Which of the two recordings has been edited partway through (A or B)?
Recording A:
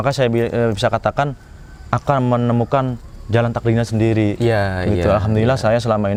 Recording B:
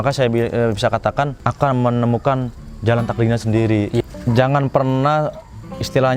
B